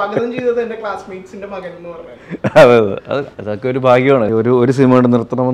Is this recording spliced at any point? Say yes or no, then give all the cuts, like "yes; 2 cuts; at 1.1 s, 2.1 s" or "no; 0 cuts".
yes; 1 cut; at 4.3 s